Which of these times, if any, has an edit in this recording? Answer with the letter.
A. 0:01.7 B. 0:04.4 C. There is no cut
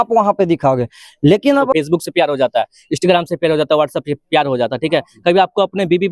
A